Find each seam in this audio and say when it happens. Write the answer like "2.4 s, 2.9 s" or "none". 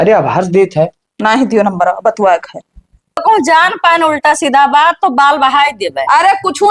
3.2 s